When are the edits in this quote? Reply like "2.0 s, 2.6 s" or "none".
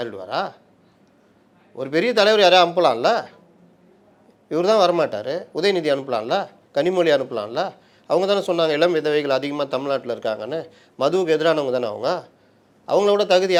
none